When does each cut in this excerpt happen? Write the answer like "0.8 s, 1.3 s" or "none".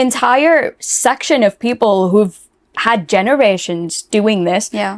none